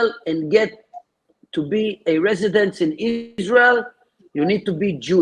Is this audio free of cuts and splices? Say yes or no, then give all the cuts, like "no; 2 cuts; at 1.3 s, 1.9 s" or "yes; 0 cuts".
no; 1 cut; at 3.3 s